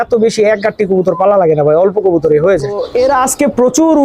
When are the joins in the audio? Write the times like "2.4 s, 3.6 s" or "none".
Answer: 2.8 s